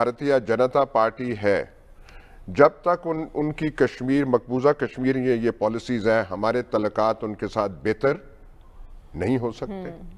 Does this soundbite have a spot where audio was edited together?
no; 0 cuts

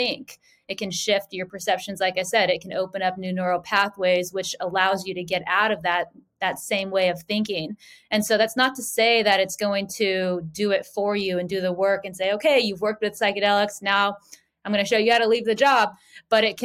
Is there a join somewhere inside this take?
no; 0 cuts

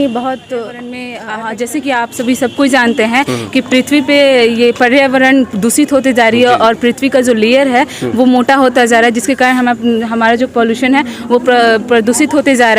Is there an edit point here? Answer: yes; 1 cut; at 1.1 s

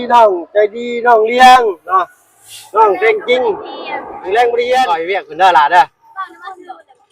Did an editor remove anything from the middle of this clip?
yes; 1 cut; at 5.0 s

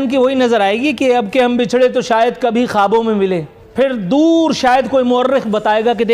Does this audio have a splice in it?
yes; 1 cut; at 3.6 s

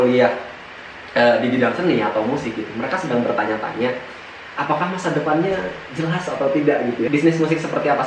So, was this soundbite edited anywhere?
yes; 1 cut; at 7.1 s

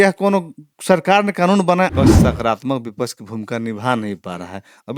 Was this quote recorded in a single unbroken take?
no; 1 cut; at 1.9 s

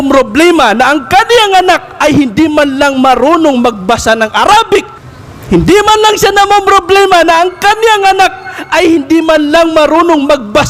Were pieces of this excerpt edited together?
no; 0 cuts

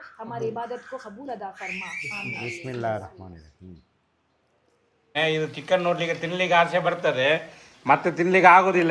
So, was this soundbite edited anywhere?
yes; 1 cut; at 5.1 s

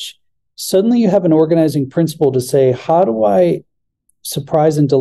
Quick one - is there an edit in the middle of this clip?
no; 0 cuts

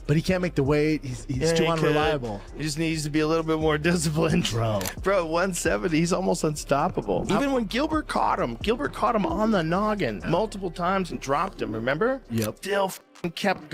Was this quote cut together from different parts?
no; 0 cuts

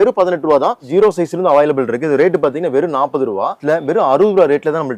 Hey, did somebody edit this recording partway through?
yes; 2 cuts; at 0.9 s, 3.6 s

